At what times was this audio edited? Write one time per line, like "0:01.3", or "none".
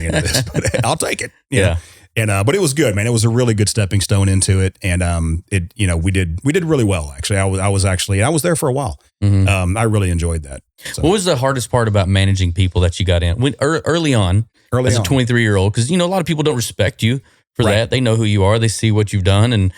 none